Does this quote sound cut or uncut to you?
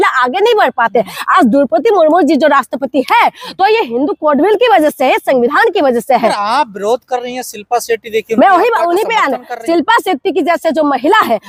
uncut